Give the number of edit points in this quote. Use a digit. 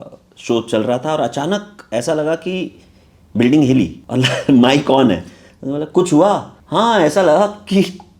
2